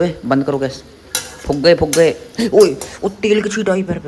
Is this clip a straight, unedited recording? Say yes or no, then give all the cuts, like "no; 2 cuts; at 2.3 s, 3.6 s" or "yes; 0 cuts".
yes; 0 cuts